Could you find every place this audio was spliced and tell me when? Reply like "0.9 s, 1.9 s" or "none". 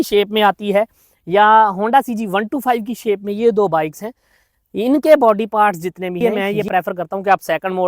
6.2 s